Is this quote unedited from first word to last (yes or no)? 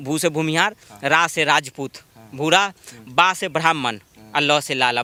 yes